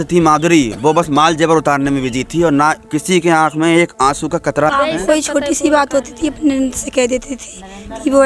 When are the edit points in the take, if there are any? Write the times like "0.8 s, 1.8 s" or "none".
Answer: 4.7 s